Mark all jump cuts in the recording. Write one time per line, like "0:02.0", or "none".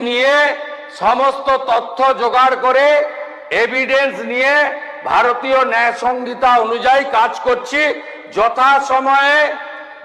none